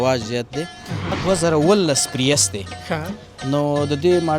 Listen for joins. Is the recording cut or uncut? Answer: cut